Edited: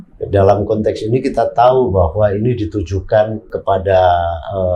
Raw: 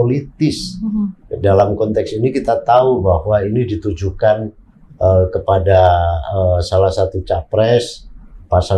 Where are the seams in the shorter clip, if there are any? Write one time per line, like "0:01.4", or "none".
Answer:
0:03.6